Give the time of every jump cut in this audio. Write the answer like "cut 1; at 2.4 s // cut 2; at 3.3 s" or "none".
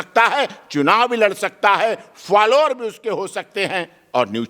none